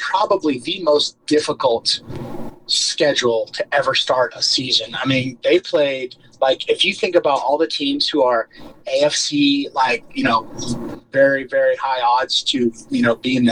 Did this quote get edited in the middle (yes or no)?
no